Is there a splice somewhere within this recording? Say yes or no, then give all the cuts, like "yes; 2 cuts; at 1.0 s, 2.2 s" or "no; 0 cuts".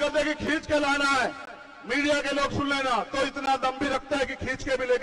no; 0 cuts